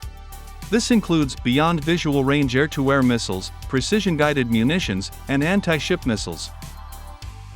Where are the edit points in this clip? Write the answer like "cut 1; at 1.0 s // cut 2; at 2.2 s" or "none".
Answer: cut 1; at 6.4 s

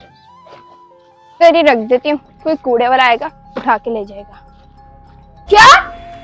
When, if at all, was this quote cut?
cut 1; at 1.4 s // cut 2; at 5.3 s

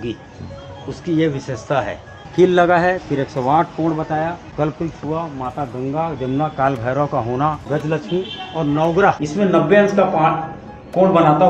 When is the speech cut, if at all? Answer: cut 1; at 2.2 s // cut 2; at 4.5 s // cut 3; at 7.6 s // cut 4; at 9.2 s

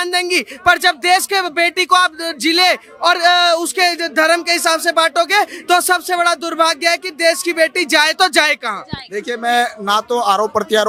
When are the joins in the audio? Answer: none

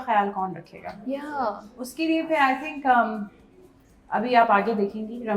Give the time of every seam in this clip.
none

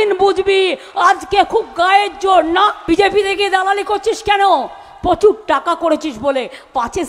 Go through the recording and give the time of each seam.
cut 1; at 2.8 s

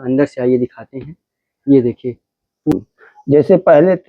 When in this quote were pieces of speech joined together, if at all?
cut 1; at 2.7 s

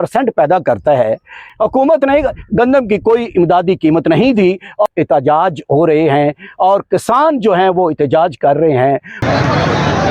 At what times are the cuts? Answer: cut 1; at 1.5 s // cut 2; at 4.9 s // cut 3; at 9.2 s

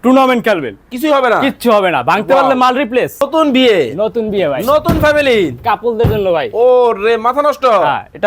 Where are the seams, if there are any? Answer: cut 1; at 3.2 s

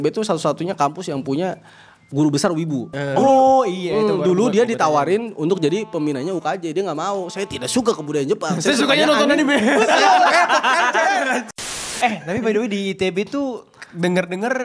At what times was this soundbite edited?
cut 1; at 3.0 s // cut 2; at 11.5 s

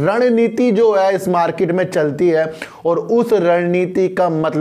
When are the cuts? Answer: none

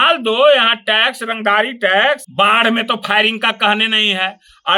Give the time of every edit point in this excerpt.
cut 1; at 2.3 s

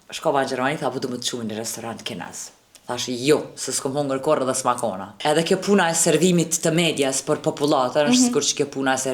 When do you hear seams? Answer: cut 1; at 5.1 s

